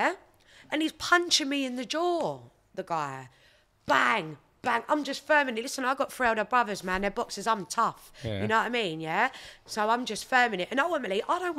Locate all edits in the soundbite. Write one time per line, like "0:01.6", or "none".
none